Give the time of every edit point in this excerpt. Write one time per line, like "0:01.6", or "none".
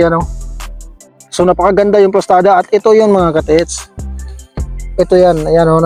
none